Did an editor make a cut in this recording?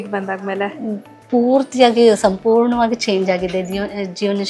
no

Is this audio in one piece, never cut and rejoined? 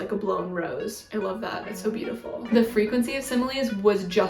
no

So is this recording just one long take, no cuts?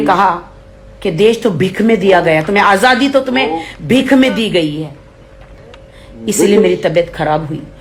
yes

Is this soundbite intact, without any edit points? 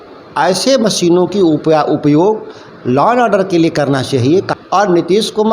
no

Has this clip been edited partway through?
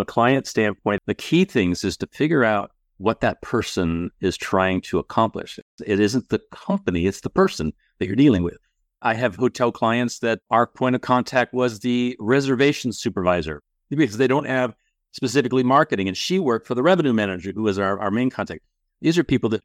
yes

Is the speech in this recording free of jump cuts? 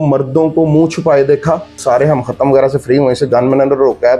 no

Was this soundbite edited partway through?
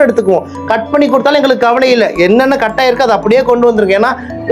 no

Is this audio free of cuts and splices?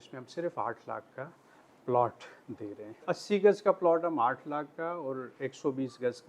no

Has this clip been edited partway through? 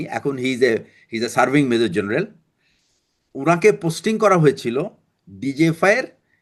no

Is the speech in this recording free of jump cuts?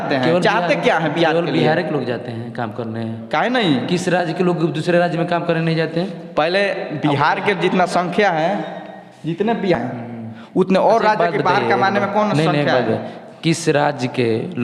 yes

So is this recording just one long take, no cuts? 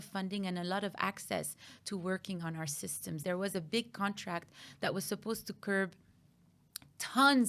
no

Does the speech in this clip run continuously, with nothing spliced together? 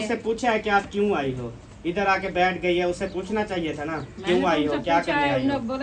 yes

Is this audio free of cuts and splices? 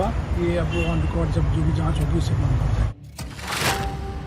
no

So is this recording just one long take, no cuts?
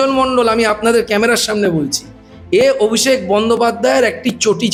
yes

